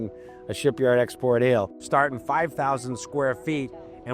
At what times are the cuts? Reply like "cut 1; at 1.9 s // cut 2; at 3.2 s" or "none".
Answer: cut 1; at 1.8 s

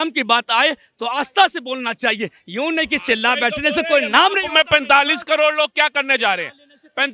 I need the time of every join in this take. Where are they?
none

